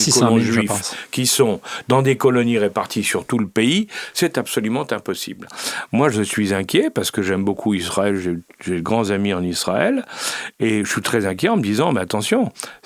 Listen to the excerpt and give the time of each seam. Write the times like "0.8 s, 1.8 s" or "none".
5.5 s